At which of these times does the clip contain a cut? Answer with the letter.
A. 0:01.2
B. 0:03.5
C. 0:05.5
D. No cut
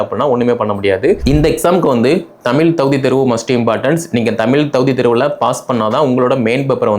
A